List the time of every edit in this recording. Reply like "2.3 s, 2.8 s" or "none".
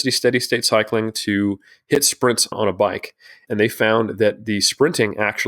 2.4 s